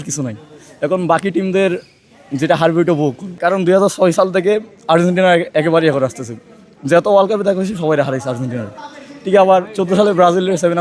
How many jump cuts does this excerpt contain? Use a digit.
1